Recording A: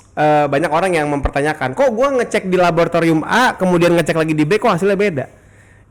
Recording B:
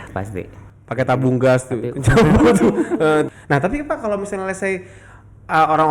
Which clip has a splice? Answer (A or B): B